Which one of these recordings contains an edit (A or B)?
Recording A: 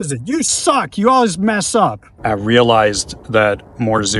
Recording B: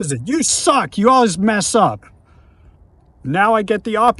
A